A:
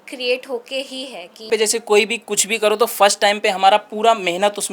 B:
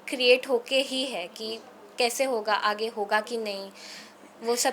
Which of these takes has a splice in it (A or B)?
A